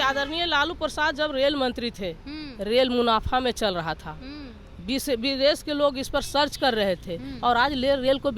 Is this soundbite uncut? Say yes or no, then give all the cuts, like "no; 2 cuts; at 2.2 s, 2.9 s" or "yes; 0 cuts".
yes; 0 cuts